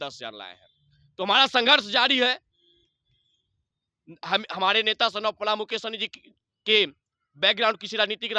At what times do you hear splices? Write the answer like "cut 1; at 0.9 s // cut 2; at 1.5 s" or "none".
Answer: none